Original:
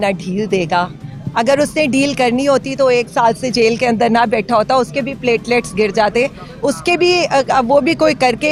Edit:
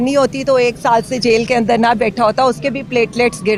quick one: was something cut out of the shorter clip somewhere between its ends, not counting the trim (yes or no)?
no